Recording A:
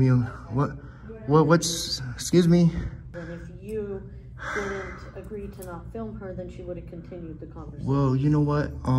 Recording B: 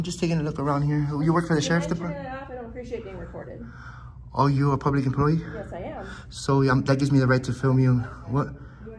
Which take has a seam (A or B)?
A